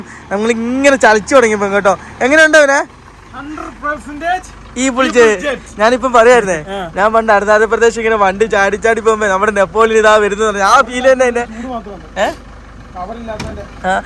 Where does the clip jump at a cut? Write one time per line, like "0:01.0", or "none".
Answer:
none